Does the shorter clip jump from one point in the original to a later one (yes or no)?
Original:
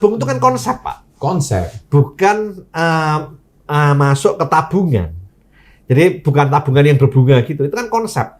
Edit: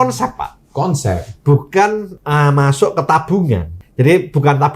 yes